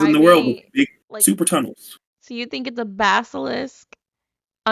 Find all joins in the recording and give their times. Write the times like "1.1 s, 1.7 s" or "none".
1.1 s